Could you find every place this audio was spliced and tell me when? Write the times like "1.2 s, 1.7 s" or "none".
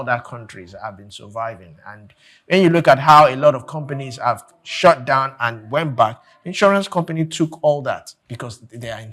8.2 s